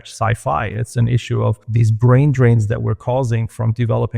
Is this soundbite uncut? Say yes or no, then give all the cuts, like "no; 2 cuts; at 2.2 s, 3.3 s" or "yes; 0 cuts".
no; 1 cut; at 1.7 s